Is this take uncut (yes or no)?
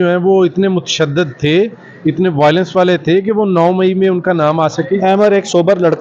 yes